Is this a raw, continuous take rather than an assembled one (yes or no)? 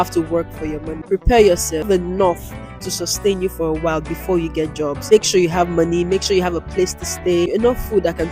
no